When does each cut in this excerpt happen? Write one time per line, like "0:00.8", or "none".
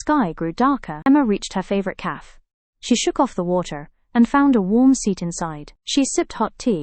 0:01.0